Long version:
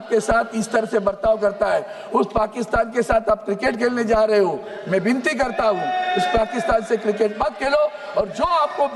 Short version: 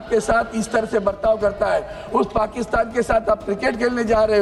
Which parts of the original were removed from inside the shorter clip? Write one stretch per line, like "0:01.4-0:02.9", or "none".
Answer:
none